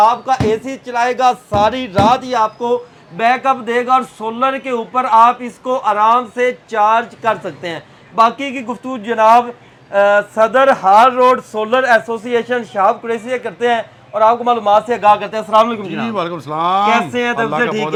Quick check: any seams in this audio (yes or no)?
no